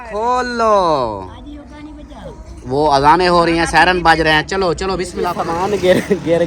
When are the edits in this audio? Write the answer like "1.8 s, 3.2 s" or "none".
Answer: 5.4 s